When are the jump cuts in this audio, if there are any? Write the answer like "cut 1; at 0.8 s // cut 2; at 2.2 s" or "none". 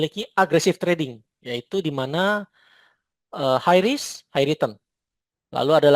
none